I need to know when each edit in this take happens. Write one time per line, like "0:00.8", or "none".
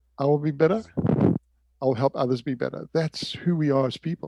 none